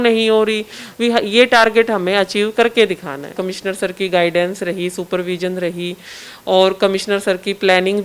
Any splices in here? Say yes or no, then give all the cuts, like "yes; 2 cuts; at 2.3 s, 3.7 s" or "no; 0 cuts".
yes; 1 cut; at 3.4 s